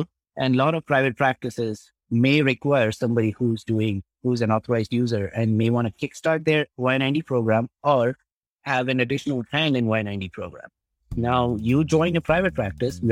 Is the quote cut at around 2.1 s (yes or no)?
no